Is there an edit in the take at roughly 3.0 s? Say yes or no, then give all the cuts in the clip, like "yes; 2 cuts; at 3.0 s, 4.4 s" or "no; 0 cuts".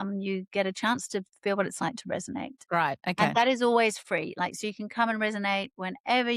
no; 0 cuts